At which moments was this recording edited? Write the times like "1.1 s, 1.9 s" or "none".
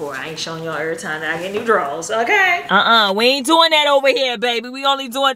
2.6 s